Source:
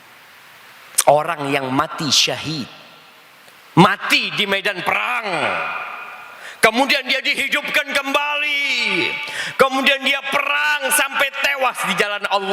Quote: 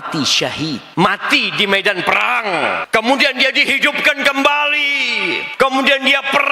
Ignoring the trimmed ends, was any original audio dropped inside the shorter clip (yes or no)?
yes